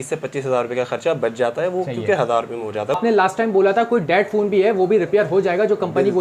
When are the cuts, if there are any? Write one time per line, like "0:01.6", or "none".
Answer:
0:03.0